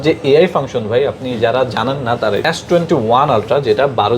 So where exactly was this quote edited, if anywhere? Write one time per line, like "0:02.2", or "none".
0:02.4